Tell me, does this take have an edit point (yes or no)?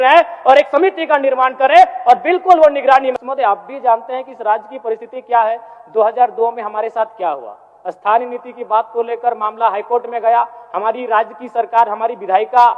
yes